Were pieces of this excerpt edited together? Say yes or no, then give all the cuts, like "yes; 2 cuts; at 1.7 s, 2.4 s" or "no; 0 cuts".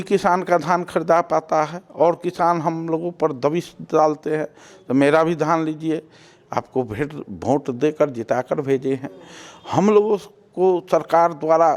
no; 0 cuts